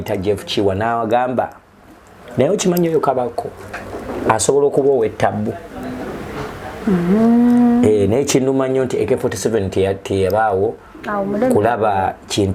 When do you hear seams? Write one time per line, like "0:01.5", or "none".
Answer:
none